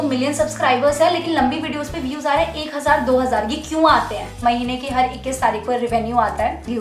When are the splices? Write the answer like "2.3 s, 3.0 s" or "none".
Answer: 4.4 s